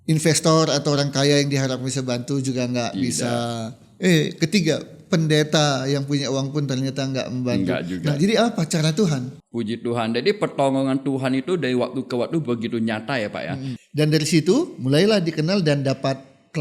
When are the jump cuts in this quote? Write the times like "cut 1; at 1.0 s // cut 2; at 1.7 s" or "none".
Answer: cut 1; at 9.3 s // cut 2; at 13.7 s